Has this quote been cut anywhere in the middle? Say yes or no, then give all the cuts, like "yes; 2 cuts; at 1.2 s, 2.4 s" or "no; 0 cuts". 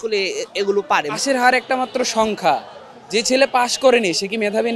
yes; 1 cut; at 1.2 s